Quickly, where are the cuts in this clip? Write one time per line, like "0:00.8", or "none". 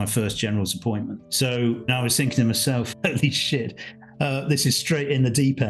0:01.2
0:01.9

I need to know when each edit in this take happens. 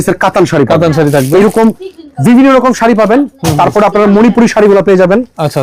none

